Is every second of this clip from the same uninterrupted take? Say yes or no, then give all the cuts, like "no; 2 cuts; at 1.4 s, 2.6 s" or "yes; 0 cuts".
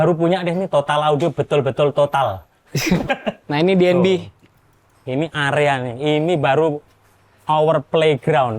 no; 1 cut; at 3.4 s